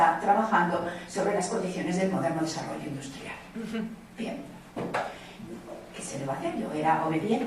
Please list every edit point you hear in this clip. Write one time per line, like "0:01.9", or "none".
0:06.2